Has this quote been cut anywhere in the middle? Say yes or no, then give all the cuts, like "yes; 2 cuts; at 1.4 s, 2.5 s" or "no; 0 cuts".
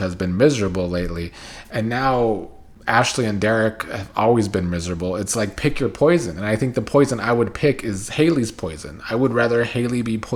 no; 0 cuts